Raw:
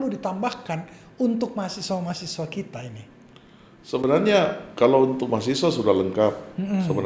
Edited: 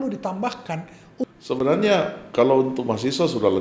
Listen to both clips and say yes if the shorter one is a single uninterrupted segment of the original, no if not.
no